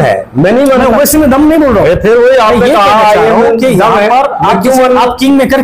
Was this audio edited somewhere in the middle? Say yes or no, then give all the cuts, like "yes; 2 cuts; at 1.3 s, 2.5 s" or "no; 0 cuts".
no; 0 cuts